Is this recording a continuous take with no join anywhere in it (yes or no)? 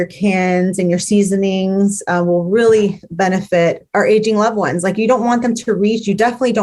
yes